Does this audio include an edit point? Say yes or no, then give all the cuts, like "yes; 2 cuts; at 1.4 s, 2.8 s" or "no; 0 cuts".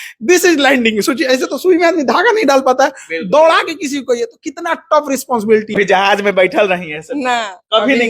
yes; 1 cut; at 5.7 s